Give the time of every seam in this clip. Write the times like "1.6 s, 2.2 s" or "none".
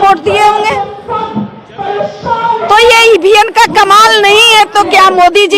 none